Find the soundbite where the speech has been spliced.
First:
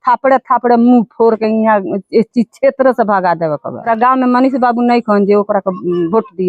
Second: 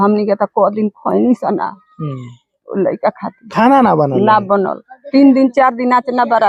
first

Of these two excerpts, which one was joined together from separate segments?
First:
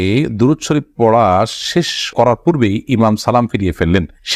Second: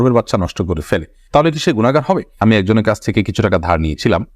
second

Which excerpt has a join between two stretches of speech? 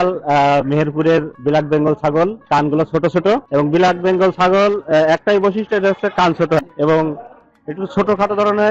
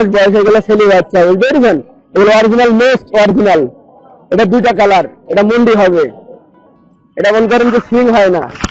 first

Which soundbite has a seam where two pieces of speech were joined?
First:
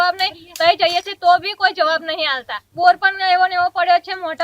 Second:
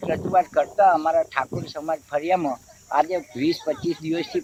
first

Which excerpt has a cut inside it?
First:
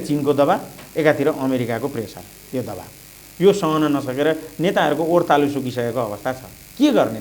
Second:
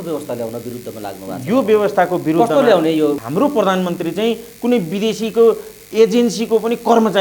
second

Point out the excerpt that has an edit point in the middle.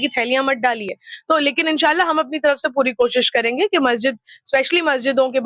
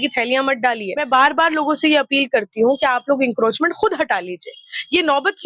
second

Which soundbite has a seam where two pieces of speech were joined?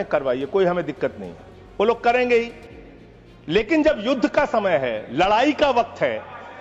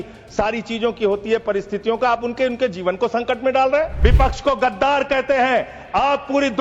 second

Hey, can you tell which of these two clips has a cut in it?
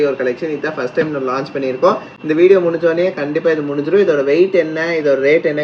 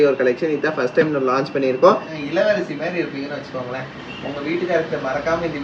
second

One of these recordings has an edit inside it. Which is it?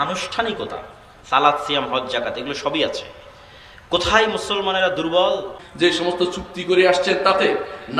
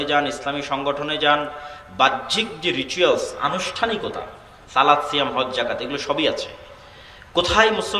first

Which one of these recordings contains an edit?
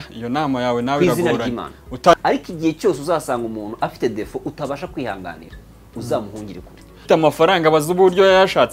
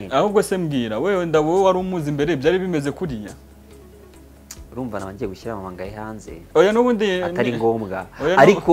first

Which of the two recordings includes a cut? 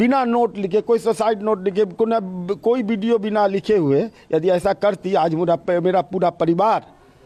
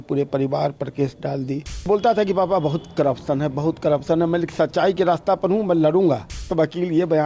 second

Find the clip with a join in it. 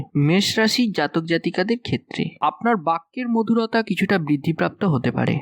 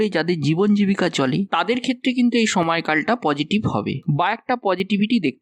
first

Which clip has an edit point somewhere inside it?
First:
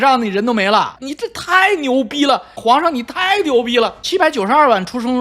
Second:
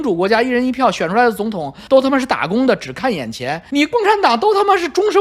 first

